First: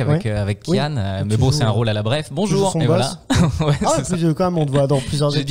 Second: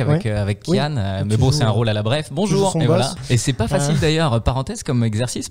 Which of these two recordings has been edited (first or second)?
second